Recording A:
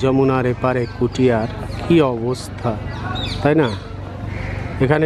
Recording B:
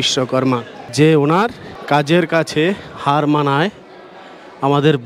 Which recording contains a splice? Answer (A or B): B